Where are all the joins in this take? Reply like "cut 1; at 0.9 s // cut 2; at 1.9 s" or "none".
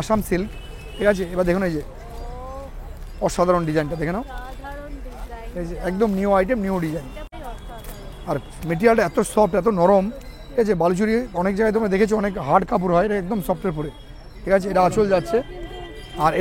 cut 1; at 7.2 s